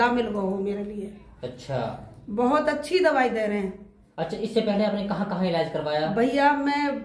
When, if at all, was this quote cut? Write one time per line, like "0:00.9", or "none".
none